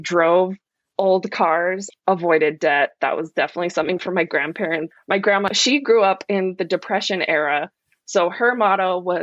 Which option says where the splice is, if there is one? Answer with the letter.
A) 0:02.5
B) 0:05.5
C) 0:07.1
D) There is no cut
B